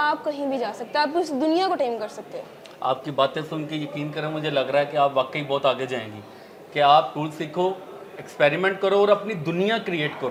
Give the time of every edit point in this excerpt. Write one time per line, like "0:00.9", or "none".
none